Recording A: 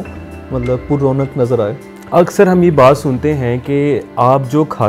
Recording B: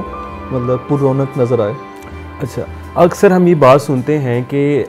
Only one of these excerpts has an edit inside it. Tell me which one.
A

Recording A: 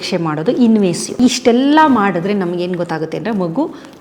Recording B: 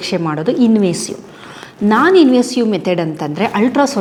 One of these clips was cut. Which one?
A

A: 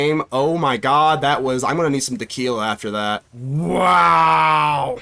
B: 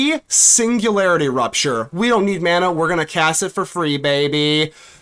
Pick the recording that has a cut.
A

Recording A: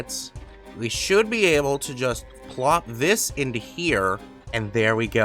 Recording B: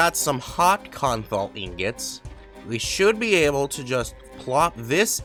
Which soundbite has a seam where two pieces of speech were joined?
A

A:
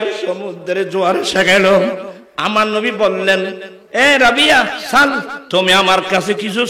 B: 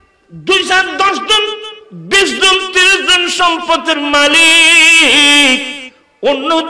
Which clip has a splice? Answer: A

